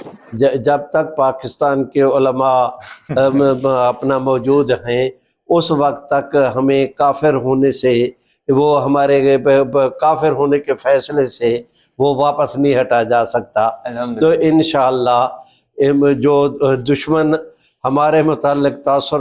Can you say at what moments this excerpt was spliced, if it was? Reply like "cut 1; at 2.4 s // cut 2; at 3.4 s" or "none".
none